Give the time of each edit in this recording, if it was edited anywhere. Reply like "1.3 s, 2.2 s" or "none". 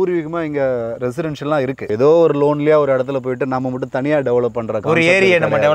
1.9 s